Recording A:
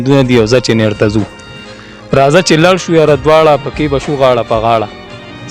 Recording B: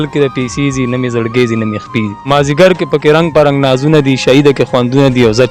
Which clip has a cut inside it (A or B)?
B